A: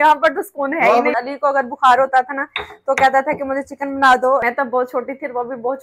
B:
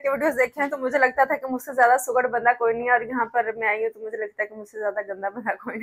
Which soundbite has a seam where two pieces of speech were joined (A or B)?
A